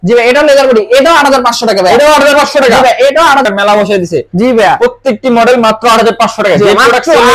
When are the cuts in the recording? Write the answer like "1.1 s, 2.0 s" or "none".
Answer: 3.4 s